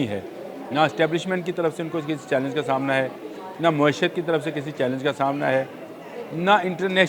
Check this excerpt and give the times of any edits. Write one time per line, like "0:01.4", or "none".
none

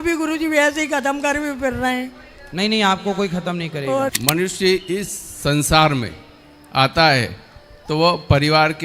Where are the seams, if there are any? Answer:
0:04.1

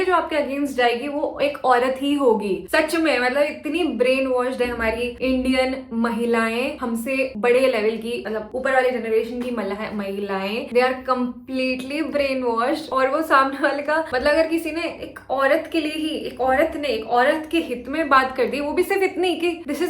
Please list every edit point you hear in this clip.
none

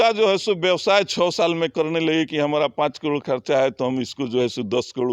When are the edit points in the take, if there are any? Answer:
none

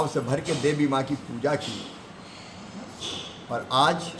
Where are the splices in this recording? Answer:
none

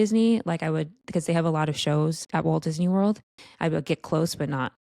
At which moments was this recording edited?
0:02.2
0:03.4

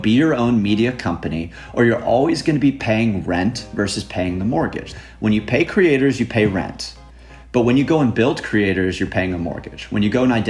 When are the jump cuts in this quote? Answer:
0:04.9

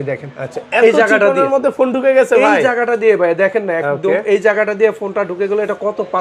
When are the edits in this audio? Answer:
none

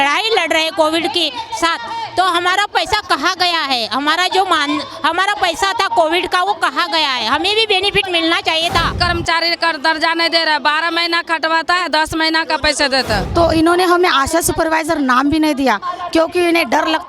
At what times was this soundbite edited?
0:08.9
0:13.3

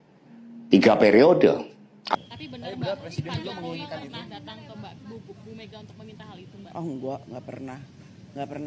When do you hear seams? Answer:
0:02.1

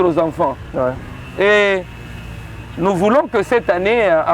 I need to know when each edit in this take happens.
none

